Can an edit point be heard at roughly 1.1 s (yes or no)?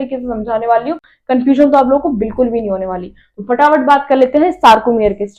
no